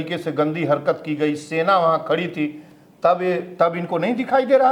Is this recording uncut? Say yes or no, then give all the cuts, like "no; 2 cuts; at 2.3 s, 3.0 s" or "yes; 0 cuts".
yes; 0 cuts